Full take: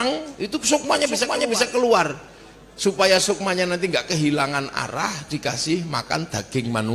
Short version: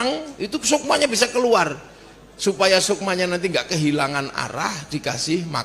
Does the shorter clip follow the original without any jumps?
no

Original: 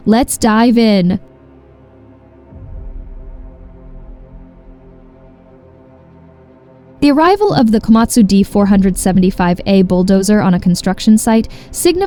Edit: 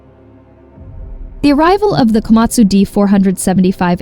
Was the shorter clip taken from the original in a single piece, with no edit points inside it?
no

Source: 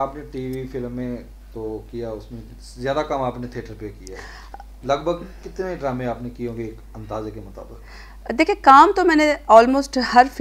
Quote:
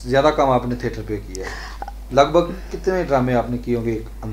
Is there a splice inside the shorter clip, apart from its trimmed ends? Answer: no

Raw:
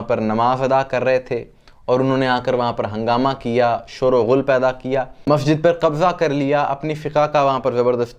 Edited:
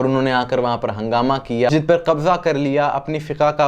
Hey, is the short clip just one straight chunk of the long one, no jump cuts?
no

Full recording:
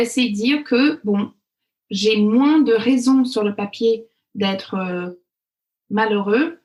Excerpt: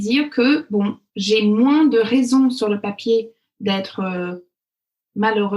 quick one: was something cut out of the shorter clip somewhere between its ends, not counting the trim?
yes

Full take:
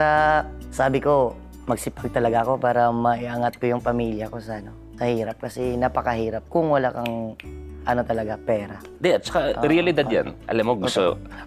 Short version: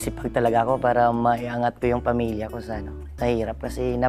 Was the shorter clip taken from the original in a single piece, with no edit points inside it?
yes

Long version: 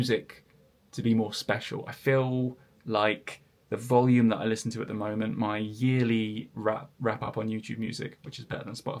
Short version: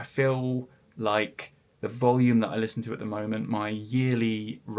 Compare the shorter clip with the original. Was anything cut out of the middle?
no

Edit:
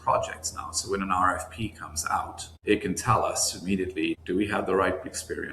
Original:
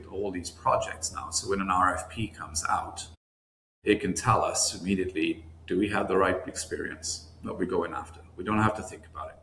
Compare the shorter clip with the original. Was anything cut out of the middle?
yes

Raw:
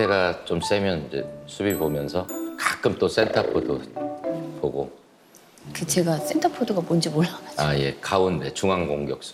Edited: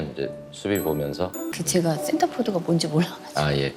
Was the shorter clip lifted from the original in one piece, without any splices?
no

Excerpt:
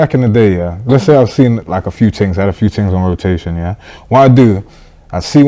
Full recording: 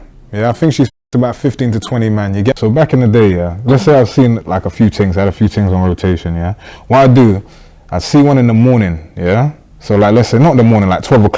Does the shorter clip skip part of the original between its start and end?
no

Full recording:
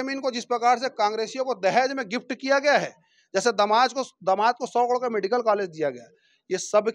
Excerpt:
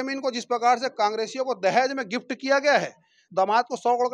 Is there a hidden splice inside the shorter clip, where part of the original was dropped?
yes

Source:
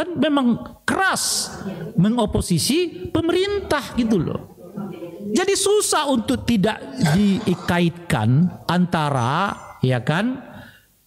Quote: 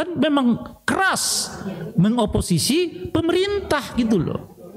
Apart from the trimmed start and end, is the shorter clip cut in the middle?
no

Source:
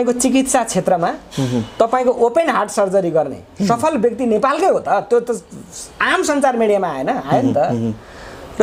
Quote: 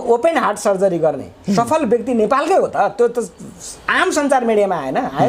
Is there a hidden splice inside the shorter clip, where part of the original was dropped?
no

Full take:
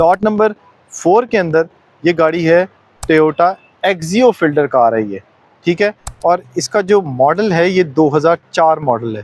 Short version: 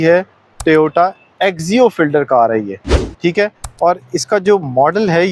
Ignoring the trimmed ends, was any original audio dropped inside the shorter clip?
no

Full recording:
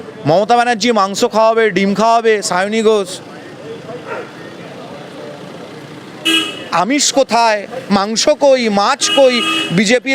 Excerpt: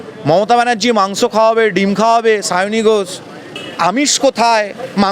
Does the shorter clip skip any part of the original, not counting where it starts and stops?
yes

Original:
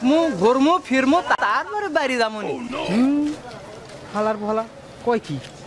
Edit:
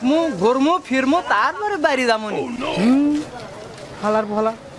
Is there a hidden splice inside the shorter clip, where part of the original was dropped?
yes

